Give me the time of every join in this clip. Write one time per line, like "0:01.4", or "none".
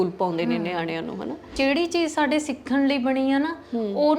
0:01.5

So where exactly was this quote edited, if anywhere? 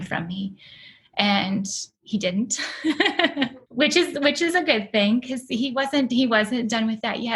0:03.6

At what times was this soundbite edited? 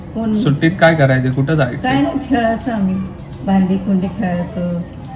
none

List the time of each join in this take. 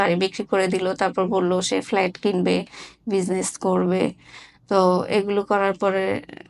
none

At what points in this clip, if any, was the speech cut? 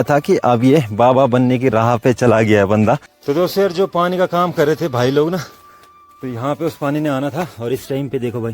0:03.1

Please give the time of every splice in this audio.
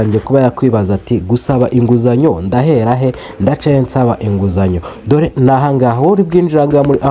none

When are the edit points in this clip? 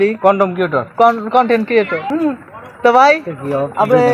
0:02.0

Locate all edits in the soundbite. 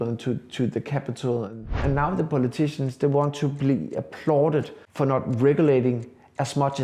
0:01.8
0:04.8

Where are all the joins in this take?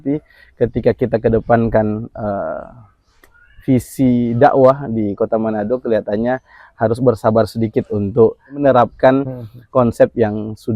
0:08.6

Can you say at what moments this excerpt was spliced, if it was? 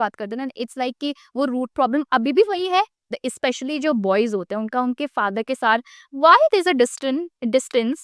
0:03.2

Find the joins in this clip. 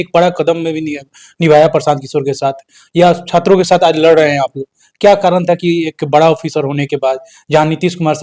none

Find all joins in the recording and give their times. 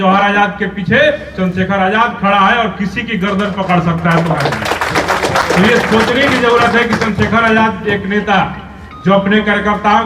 none

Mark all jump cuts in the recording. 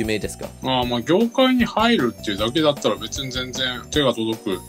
0:03.7

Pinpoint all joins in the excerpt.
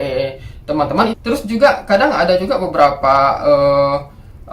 0:01.1

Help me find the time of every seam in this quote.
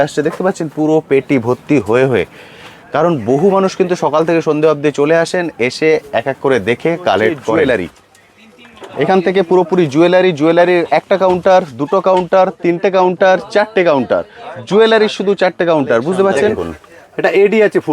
0:07.6
0:16.7

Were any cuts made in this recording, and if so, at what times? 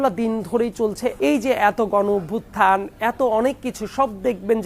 0:01.2

